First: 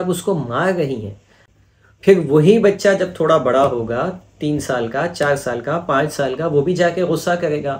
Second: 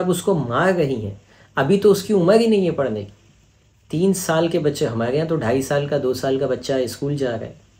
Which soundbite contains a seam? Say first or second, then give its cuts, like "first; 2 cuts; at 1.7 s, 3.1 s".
first; 1 cut; at 1.4 s